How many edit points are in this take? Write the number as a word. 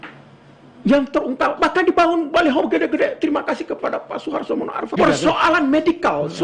one